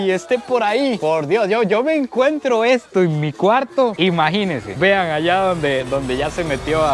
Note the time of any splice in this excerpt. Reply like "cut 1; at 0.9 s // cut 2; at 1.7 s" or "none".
none